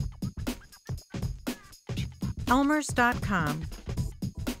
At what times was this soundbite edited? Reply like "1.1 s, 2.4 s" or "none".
2.5 s, 3.7 s